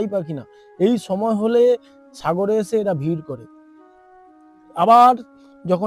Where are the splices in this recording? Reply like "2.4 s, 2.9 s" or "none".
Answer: none